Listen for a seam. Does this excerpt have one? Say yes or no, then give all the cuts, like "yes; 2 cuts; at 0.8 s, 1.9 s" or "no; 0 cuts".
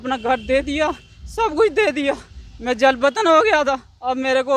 no; 0 cuts